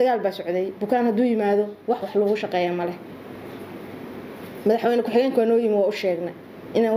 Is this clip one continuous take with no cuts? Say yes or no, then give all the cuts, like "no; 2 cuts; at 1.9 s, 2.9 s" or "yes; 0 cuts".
yes; 0 cuts